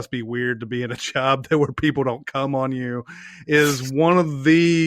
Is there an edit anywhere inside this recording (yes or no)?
no